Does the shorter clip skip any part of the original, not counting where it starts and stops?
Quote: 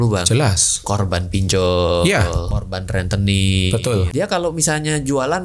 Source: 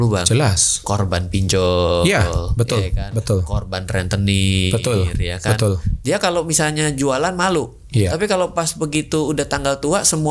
yes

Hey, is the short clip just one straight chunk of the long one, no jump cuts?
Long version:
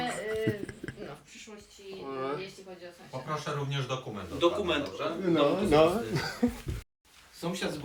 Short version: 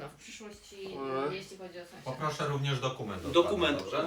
yes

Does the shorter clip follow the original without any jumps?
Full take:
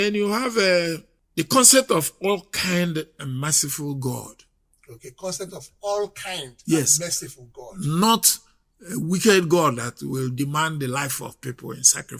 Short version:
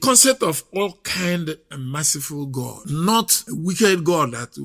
no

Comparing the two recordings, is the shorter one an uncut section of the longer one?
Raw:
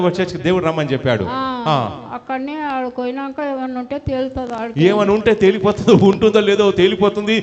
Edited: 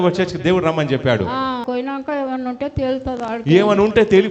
no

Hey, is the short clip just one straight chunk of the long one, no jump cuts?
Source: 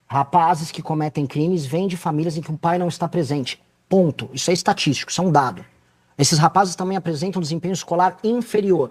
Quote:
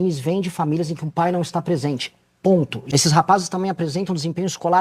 no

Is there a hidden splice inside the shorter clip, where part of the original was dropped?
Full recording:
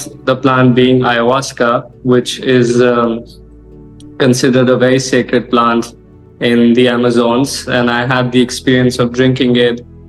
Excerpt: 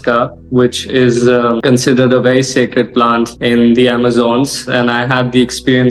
yes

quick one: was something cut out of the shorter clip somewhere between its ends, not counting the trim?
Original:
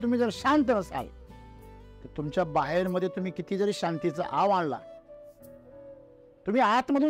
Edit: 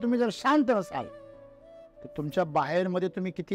no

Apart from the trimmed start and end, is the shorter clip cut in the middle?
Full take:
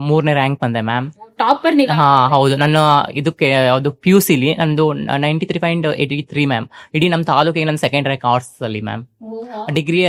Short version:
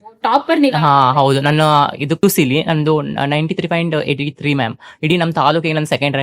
yes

